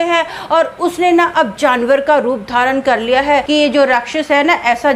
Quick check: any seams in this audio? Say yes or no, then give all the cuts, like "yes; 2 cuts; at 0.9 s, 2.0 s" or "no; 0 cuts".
yes; 1 cut; at 3.5 s